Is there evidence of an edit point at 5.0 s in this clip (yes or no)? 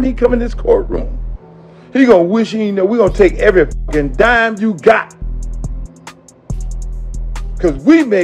yes